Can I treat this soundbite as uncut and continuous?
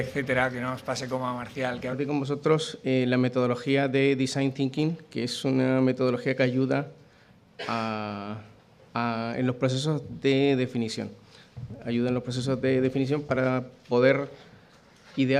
yes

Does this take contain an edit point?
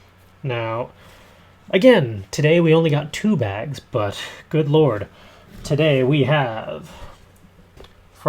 yes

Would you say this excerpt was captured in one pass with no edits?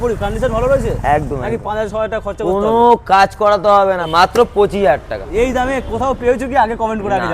no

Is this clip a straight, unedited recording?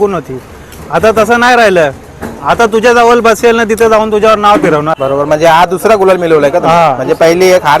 no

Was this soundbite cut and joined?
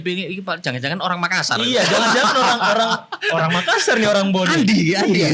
no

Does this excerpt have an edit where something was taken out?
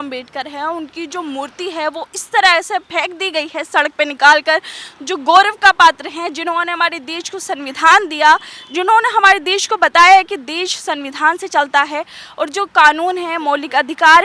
no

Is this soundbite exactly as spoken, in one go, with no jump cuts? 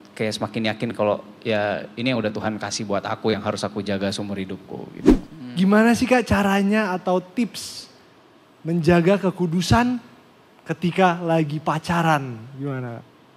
no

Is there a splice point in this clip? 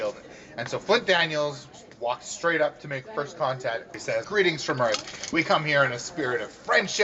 yes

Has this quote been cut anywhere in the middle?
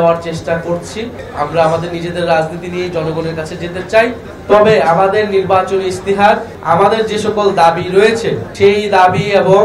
no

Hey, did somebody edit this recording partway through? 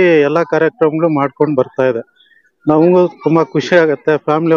no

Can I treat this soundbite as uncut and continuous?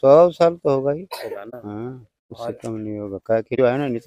yes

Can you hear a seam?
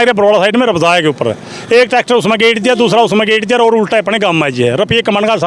no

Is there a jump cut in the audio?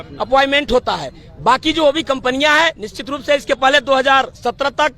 no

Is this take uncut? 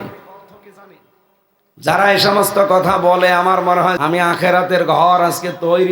no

